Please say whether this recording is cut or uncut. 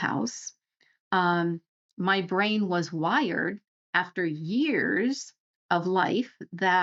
uncut